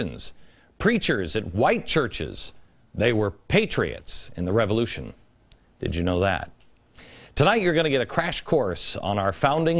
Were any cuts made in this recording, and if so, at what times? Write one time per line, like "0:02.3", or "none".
none